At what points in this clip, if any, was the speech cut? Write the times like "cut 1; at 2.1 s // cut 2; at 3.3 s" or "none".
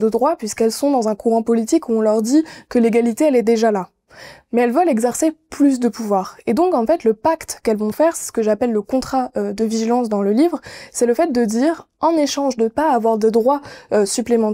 none